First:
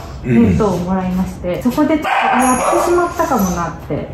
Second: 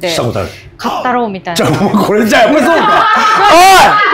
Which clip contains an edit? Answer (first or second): first